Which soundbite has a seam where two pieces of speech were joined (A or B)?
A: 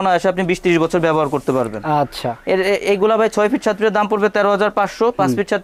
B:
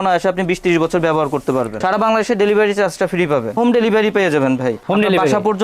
B